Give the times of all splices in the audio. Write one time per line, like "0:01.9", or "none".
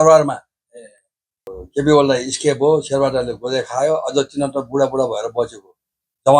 0:01.6